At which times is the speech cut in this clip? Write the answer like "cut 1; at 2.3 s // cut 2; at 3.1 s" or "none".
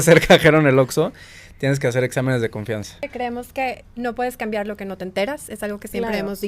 cut 1; at 3.0 s

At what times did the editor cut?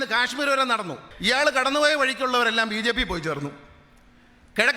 cut 1; at 1.1 s

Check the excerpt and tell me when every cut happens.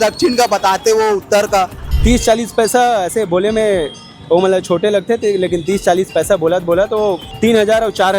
cut 1; at 1.8 s // cut 2; at 7.3 s

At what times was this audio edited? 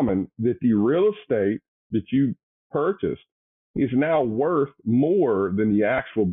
cut 1; at 1.7 s

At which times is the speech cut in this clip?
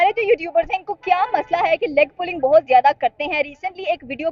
none

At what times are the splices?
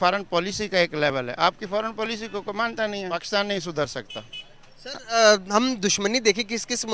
cut 1; at 3.2 s

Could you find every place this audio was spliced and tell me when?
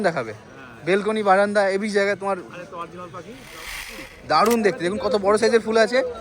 cut 1; at 4.0 s

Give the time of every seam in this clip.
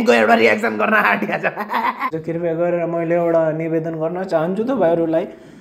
cut 1; at 2.1 s

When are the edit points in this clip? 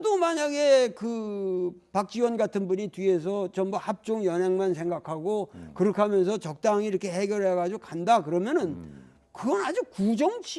cut 1; at 5.6 s

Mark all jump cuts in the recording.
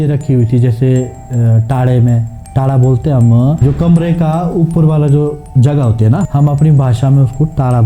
cut 1; at 3.6 s // cut 2; at 6.3 s

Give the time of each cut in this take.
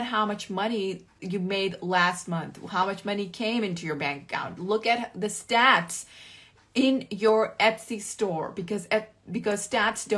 cut 1; at 1.1 s

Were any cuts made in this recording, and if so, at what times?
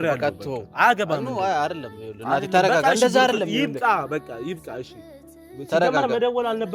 none

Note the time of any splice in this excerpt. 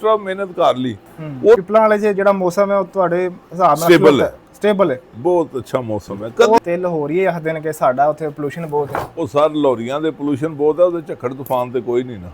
cut 1; at 1.6 s // cut 2; at 6.6 s

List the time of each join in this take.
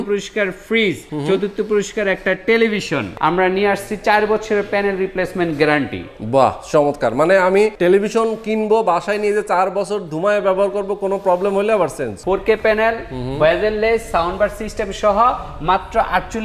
cut 1; at 1.1 s // cut 2; at 3.1 s // cut 3; at 7.7 s // cut 4; at 12.1 s

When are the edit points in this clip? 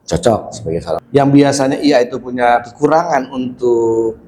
cut 1; at 1.0 s

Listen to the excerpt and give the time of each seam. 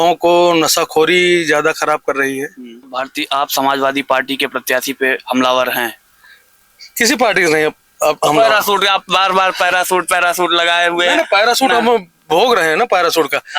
cut 1; at 2.9 s

